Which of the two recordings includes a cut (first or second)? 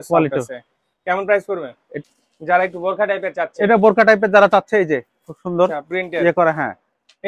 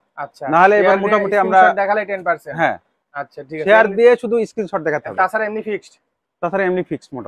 first